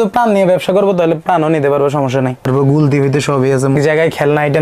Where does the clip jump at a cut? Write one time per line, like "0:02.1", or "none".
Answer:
0:02.4
0:03.8